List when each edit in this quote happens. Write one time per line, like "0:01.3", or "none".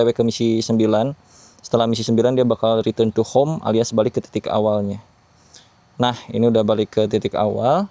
none